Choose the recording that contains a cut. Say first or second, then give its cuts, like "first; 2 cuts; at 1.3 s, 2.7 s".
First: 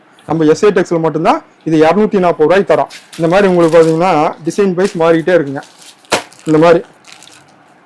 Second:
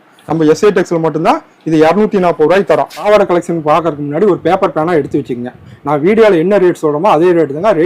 second; 1 cut; at 3.0 s